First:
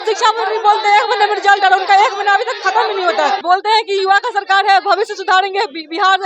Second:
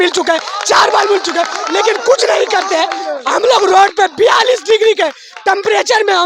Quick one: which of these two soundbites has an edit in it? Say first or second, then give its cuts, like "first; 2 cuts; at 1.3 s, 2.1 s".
first; 1 cut; at 3.4 s